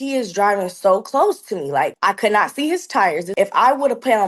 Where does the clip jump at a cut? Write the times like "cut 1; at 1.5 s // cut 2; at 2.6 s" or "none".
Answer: cut 1; at 2.0 s // cut 2; at 3.3 s